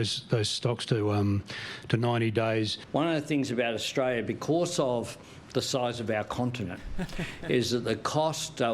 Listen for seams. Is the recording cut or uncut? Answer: cut